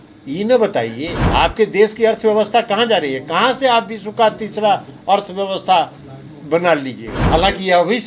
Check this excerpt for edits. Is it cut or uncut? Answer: cut